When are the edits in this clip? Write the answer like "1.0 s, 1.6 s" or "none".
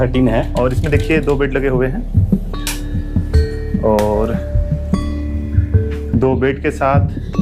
none